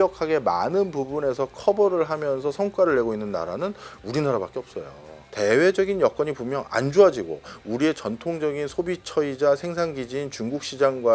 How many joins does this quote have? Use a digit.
0